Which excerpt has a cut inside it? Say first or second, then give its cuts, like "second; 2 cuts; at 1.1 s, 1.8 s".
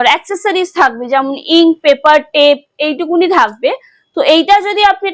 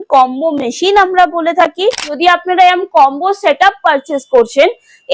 second; 1 cut; at 2.1 s